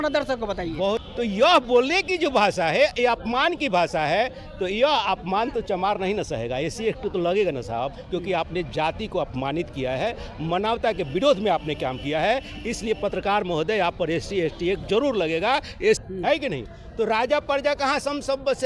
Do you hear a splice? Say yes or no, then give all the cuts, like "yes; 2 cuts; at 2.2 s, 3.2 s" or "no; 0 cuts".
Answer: yes; 2 cuts; at 1.1 s, 16.0 s